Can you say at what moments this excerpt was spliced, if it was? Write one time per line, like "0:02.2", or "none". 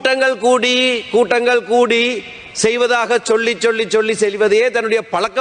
none